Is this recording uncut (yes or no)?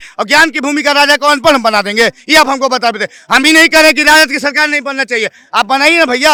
yes